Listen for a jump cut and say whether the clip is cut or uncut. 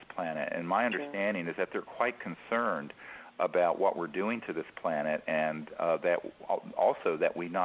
cut